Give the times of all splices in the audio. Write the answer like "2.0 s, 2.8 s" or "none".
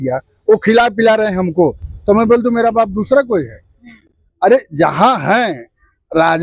none